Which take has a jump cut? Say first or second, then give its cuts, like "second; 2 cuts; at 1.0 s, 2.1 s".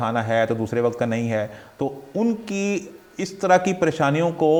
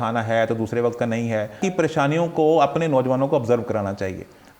second; 1 cut; at 1.6 s